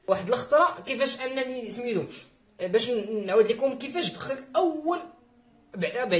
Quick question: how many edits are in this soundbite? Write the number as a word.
zero